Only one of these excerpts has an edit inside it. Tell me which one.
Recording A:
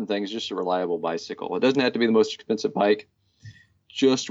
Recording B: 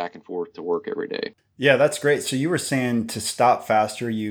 B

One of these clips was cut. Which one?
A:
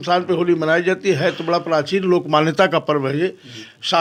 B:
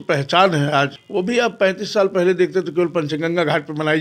B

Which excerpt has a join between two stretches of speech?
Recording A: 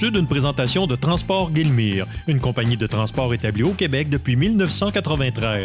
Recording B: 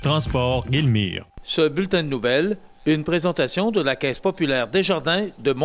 B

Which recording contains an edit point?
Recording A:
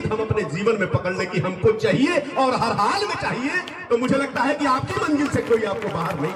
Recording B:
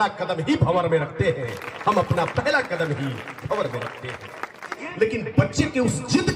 B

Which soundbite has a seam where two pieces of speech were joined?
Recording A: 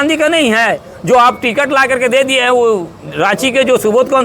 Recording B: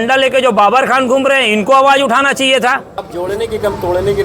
B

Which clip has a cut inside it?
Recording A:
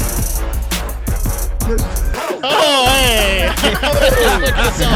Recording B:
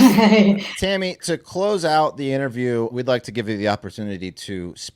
B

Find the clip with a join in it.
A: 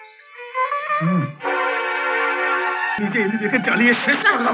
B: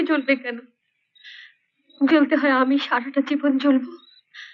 A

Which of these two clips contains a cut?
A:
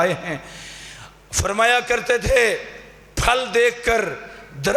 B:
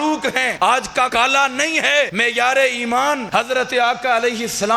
B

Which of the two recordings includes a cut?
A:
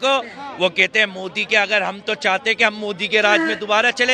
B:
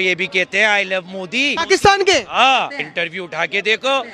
B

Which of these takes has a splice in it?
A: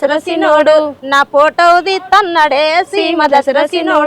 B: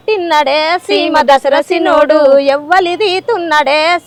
A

